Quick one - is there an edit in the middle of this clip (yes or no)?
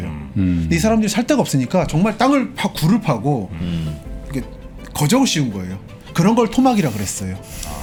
no